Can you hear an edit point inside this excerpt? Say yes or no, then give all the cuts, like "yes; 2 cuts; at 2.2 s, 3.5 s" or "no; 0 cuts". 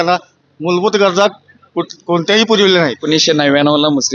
yes; 1 cut; at 3.0 s